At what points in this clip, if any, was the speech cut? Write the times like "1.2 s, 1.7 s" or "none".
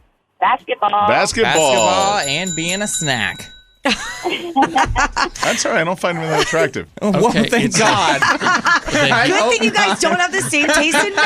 5.3 s